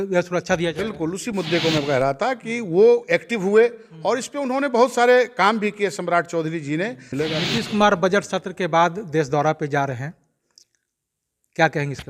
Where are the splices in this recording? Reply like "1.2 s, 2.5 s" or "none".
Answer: 7.0 s